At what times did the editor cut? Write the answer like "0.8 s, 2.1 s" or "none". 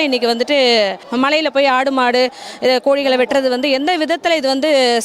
1.0 s